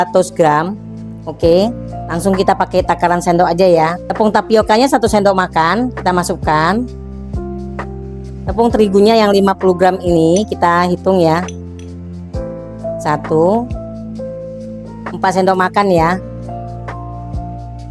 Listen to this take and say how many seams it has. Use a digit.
1